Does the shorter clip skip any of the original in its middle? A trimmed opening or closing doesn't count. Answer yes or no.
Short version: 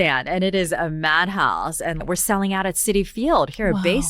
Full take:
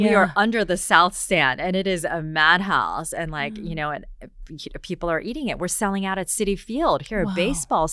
yes